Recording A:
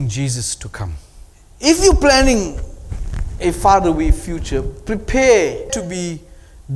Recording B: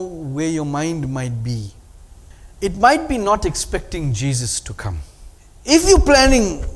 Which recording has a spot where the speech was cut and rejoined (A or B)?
A